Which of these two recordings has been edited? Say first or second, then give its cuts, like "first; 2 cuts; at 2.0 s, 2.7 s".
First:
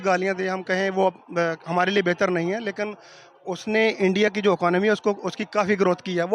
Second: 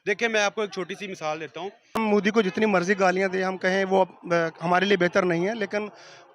second; 1 cut; at 2.0 s